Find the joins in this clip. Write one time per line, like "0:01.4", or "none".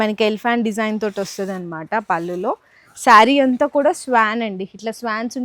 none